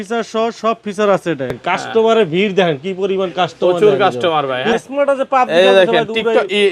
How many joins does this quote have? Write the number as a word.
two